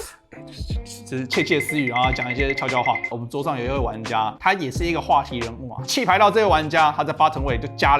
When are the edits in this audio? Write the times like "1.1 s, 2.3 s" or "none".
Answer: 3.0 s, 5.7 s